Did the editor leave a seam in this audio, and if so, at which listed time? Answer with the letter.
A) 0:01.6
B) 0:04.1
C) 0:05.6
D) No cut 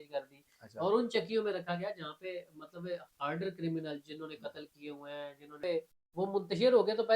C